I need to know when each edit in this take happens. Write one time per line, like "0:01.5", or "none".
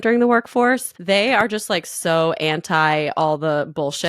0:00.9